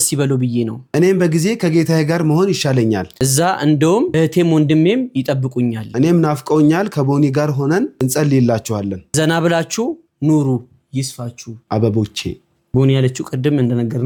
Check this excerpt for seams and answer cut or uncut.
uncut